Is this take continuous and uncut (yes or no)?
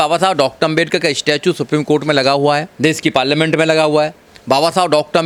yes